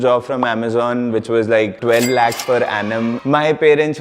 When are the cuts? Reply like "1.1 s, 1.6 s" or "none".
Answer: 1.8 s, 3.2 s